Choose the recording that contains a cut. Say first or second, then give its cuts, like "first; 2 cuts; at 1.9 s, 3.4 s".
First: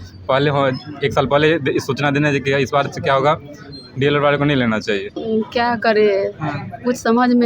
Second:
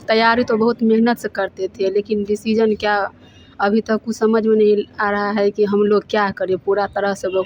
first; 1 cut; at 5.1 s